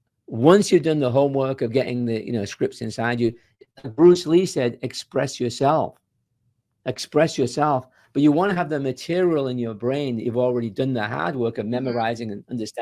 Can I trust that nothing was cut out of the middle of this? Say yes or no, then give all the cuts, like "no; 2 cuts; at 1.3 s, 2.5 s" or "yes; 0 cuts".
yes; 0 cuts